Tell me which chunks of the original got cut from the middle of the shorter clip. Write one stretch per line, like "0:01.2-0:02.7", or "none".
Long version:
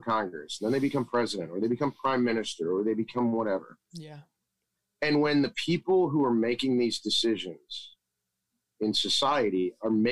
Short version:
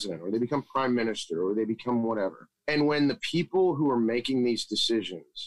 0:03.8-0:04.8